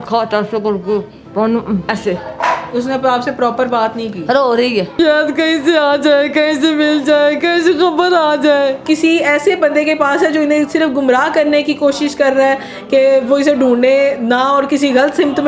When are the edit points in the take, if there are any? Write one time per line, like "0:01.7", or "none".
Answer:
0:01.9
0:04.9
0:08.8